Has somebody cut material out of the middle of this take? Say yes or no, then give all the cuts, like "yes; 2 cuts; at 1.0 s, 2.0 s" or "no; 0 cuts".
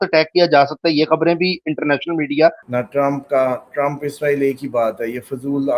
yes; 1 cut; at 2.6 s